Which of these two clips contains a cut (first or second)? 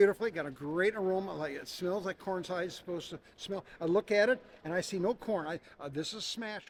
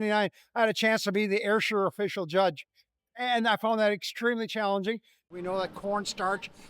second